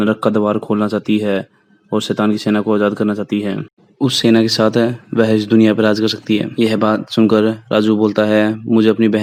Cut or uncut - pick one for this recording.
uncut